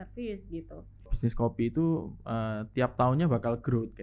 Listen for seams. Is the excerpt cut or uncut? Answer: cut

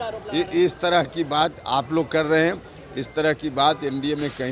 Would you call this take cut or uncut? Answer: uncut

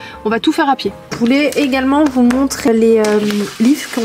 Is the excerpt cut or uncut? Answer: cut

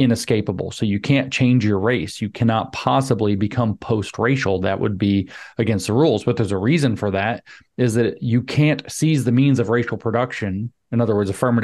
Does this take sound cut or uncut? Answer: uncut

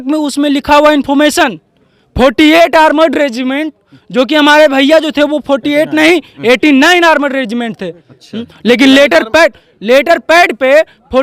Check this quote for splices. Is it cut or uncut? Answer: uncut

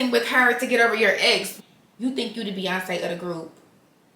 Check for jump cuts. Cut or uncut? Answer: cut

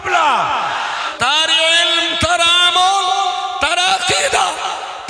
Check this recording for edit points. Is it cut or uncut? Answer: cut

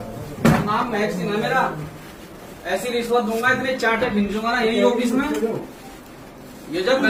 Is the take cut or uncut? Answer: uncut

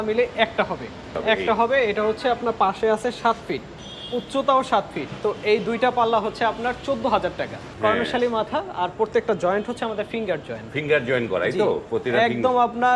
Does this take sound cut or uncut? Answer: cut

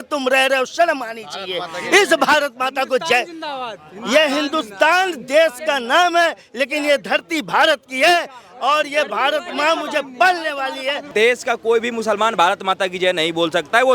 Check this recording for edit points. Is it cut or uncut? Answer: cut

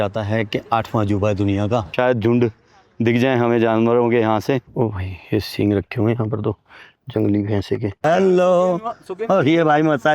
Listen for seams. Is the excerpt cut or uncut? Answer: cut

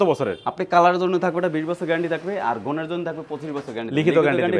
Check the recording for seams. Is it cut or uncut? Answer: uncut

